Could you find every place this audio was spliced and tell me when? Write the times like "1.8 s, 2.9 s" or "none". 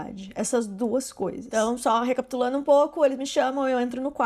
none